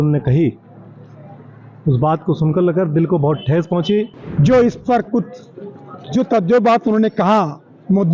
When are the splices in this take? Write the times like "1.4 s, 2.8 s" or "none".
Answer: 4.2 s